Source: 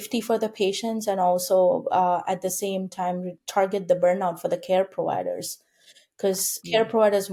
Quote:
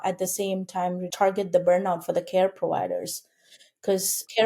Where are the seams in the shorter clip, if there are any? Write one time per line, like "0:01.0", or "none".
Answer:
0:01.1